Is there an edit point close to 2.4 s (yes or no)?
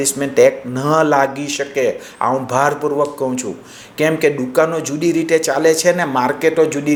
no